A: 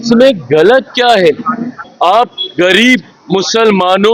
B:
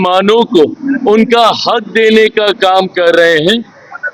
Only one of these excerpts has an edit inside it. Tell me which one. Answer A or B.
A